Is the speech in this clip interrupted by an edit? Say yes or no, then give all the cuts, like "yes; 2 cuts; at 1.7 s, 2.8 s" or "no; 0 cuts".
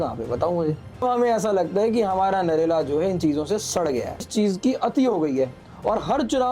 yes; 2 cuts; at 1.0 s, 4.3 s